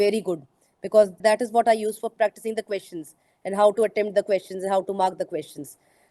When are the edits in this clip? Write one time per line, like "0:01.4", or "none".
0:02.1